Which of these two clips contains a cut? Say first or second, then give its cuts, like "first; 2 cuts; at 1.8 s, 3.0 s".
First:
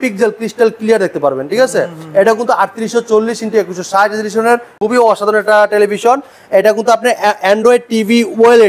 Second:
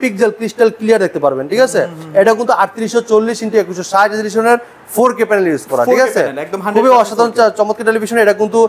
first; 1 cut; at 4.7 s